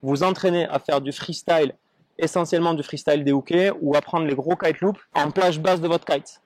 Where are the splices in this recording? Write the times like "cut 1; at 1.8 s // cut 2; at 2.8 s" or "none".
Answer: cut 1; at 5.1 s